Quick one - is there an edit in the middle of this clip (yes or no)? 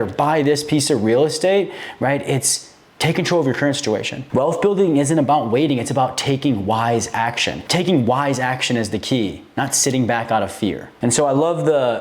yes